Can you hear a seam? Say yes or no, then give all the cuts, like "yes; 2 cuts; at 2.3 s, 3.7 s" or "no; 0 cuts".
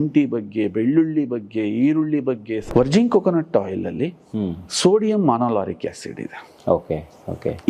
yes; 1 cut; at 2.6 s